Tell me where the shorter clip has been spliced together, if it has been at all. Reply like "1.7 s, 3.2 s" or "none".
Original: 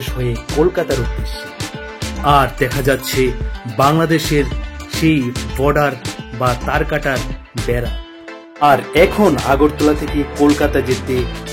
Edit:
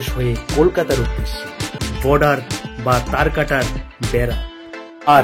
1.9 s

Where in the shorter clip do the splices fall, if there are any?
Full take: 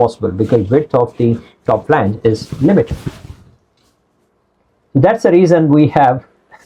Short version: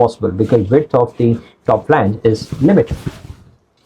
none

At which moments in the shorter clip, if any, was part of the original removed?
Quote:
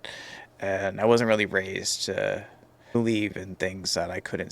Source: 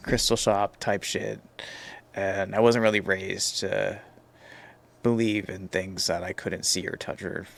2.9 s

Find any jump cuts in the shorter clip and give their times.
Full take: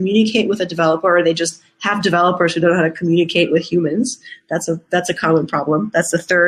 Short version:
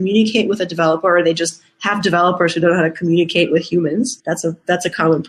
4.2 s

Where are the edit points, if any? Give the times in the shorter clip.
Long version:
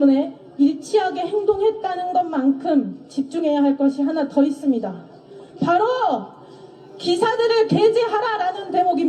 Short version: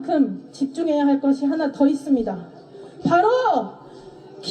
none

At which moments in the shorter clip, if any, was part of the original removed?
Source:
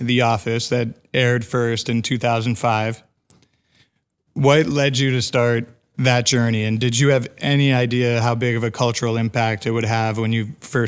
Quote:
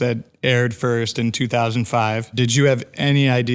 2.3 s

